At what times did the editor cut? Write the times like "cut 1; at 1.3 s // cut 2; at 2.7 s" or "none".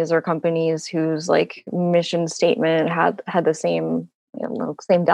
none